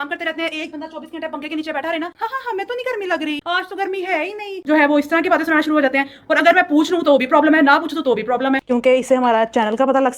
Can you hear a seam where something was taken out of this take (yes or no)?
yes